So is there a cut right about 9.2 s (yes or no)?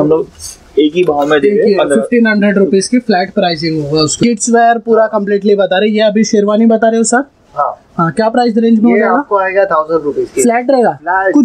no